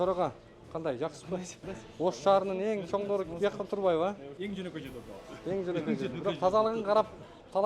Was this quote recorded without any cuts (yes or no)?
no